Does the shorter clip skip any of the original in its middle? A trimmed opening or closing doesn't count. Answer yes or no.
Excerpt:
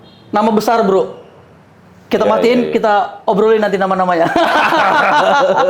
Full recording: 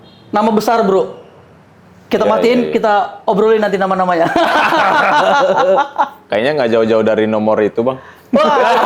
no